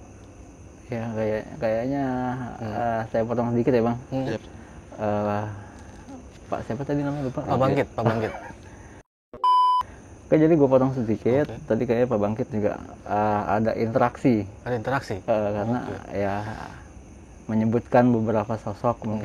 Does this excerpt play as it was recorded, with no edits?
yes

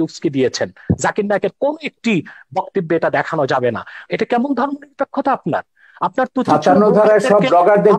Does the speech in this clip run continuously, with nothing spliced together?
no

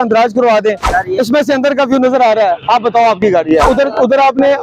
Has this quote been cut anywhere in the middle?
yes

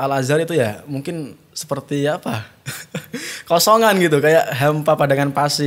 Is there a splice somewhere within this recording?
no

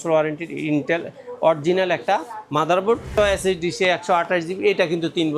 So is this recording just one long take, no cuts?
no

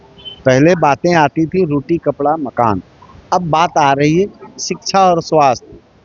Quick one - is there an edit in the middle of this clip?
no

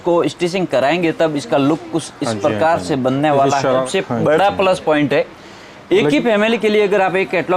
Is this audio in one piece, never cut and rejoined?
no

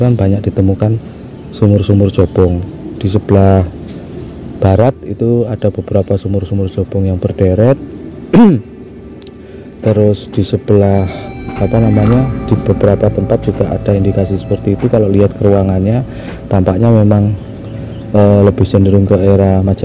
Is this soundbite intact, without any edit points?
yes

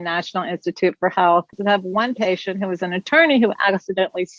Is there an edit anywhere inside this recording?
yes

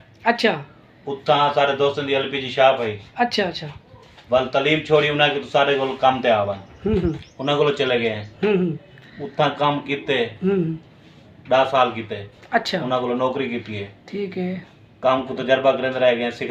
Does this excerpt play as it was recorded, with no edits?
yes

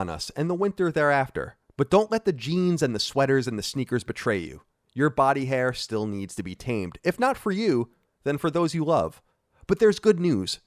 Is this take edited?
no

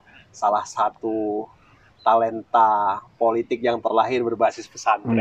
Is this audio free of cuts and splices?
yes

